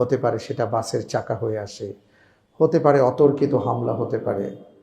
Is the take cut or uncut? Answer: uncut